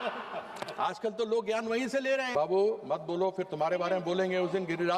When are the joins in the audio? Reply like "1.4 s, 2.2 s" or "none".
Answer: 2.3 s